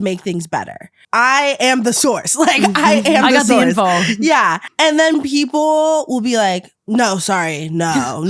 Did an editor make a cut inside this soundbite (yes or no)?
yes